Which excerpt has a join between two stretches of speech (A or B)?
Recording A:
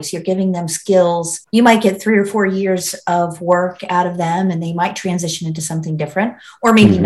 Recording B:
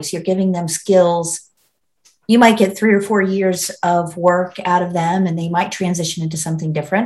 A